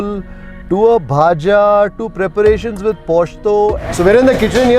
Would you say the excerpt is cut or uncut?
cut